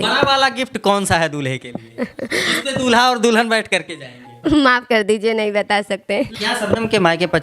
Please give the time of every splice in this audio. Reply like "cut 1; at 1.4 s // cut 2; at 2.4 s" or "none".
cut 1; at 6.4 s